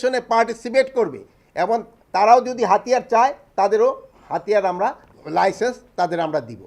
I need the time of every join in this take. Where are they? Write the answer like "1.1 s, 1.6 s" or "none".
5.1 s